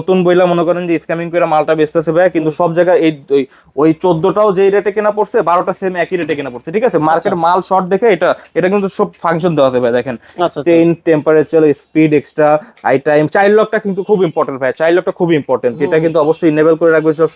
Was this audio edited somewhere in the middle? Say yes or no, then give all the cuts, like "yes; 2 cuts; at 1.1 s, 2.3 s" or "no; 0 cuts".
no; 0 cuts